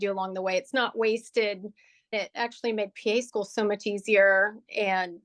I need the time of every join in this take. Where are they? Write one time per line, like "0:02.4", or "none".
0:01.9